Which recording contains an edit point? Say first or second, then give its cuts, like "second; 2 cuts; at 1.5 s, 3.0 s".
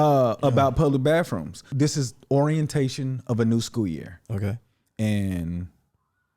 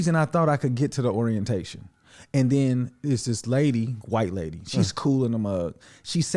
first; 1 cut; at 1.6 s